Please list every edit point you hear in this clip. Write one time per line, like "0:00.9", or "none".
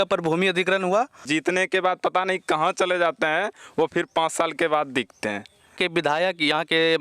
0:01.3
0:05.7